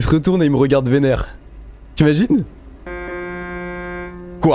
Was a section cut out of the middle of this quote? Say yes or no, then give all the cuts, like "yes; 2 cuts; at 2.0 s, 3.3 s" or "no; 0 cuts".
no; 0 cuts